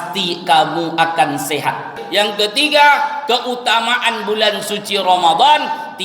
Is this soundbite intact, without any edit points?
no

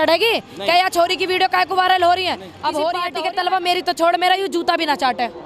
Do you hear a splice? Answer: yes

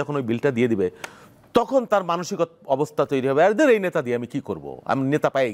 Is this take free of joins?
yes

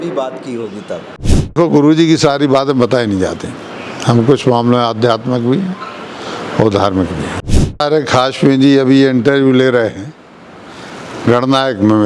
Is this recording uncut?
no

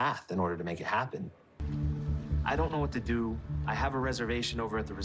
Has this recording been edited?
yes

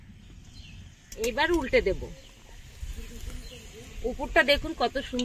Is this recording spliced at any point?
yes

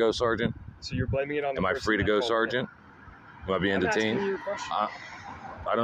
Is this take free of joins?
yes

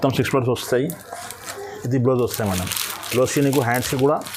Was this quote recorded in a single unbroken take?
yes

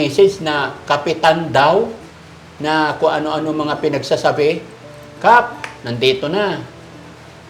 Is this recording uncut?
yes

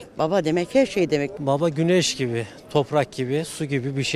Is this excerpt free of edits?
no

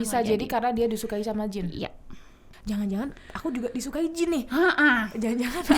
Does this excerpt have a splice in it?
yes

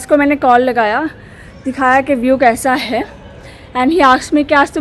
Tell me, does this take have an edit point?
no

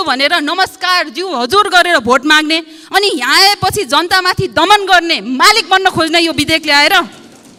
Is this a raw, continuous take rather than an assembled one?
yes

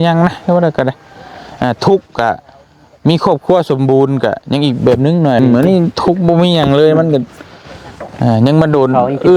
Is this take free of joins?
no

